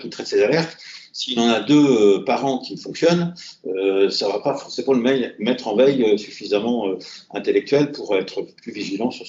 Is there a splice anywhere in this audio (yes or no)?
no